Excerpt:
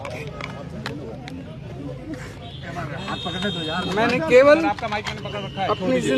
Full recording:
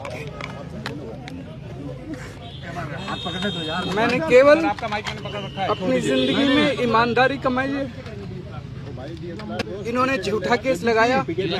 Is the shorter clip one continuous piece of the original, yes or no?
yes